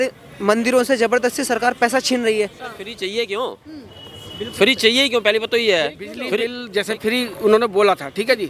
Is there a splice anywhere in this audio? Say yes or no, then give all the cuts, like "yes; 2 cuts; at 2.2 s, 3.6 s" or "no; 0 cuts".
yes; 2 cuts; at 2.9 s, 6.5 s